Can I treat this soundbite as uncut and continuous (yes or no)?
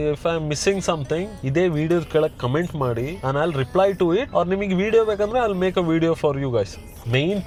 yes